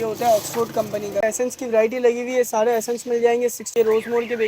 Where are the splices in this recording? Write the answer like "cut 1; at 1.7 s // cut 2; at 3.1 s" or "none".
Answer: cut 1; at 1.2 s // cut 2; at 3.7 s

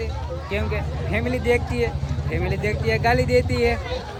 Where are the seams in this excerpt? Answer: none

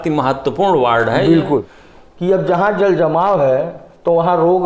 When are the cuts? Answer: cut 1; at 1.7 s

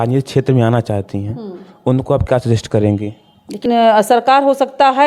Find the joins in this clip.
cut 1; at 3.6 s

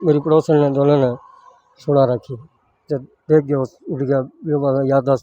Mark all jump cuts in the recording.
none

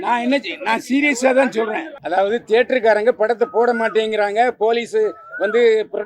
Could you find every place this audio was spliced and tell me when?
cut 1; at 1.9 s

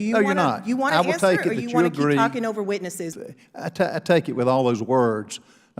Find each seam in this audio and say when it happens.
cut 1; at 3.1 s

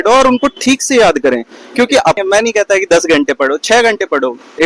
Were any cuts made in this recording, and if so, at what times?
cut 1; at 2.2 s

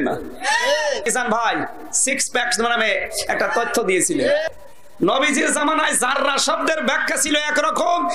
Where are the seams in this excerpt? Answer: cut 1; at 1.0 s // cut 2; at 4.4 s

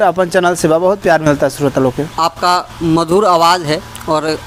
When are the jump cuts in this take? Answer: none

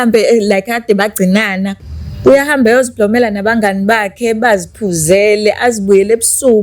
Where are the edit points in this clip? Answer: cut 1; at 1.8 s

